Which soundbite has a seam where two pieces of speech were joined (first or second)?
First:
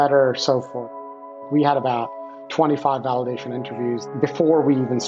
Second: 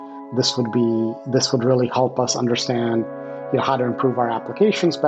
first